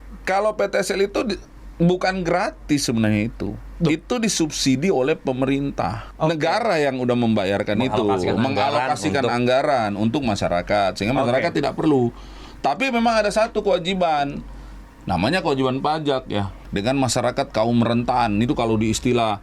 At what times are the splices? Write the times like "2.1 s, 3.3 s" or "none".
6.0 s, 16.5 s